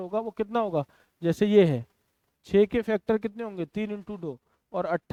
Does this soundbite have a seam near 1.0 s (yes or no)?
no